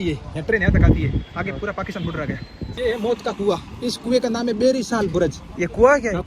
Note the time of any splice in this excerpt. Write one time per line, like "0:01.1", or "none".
0:02.7